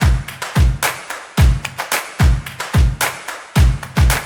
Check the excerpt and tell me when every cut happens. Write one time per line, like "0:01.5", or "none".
none